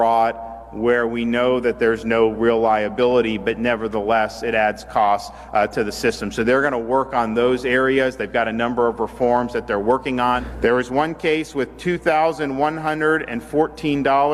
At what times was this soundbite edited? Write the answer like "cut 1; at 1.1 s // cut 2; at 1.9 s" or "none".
cut 1; at 10.5 s